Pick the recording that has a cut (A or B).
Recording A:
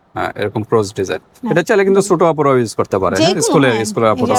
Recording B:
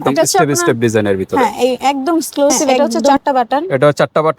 B